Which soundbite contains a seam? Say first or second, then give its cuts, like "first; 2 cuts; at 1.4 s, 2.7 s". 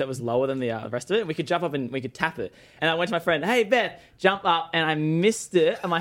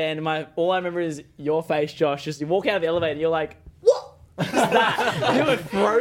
first; 1 cut; at 2.7 s